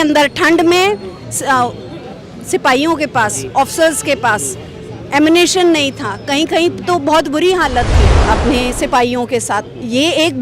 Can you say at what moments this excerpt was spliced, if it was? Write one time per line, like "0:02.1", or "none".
0:08.1